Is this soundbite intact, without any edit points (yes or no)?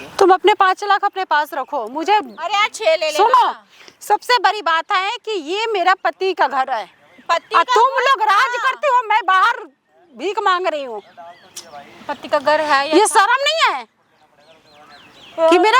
yes